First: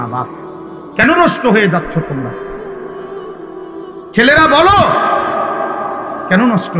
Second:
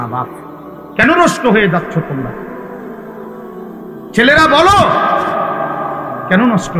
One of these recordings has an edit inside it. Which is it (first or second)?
first